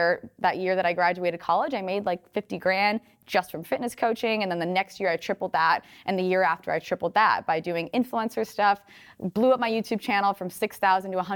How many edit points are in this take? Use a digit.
0